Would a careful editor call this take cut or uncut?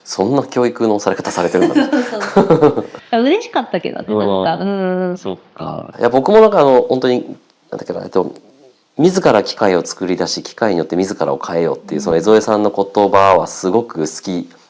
uncut